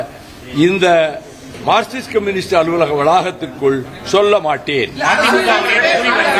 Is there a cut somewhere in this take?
no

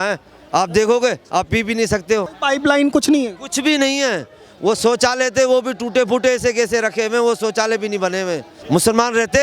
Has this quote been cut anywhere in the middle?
yes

